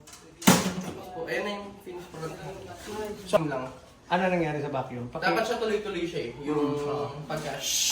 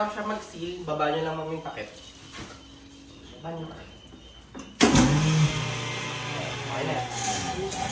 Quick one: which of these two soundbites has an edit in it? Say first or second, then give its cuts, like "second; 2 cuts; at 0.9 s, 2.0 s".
first; 1 cut; at 3.4 s